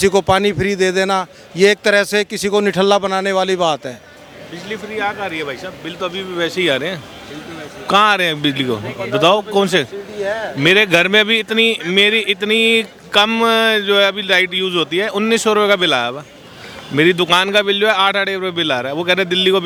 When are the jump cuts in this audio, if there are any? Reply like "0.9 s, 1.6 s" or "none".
none